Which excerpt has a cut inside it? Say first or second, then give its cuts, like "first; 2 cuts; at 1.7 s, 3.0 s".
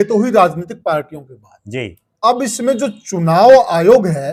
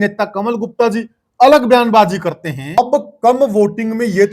second; 1 cut; at 2.8 s